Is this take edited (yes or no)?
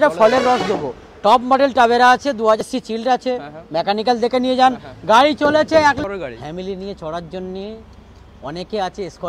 yes